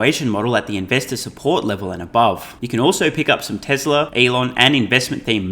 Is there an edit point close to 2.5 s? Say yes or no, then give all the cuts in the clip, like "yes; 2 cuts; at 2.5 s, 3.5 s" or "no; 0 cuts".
yes; 2 cuts; at 2.5 s, 4.1 s